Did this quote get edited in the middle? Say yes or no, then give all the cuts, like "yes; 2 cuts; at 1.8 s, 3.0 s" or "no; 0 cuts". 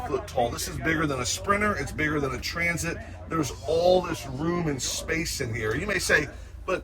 no; 0 cuts